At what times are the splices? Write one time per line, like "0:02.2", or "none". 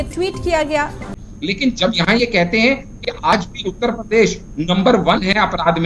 0:01.0